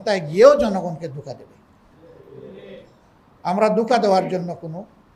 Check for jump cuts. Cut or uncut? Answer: uncut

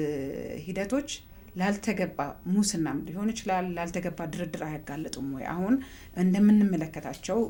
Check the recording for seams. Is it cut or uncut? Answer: uncut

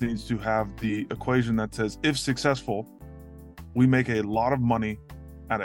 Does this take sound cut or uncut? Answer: uncut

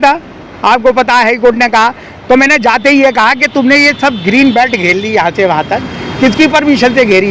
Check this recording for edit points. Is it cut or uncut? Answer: uncut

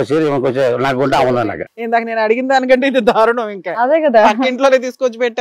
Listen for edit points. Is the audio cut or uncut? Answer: uncut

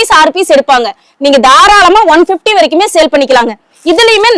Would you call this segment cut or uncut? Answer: uncut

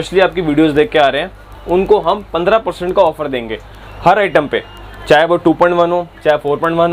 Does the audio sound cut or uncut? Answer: uncut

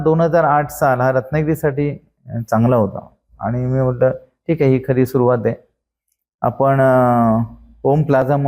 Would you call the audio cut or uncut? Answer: uncut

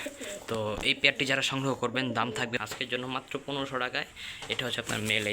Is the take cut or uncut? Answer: cut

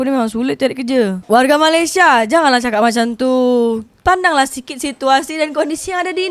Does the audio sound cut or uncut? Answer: cut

